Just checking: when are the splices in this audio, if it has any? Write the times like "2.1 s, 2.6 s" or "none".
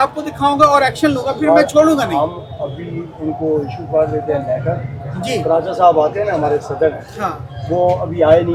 none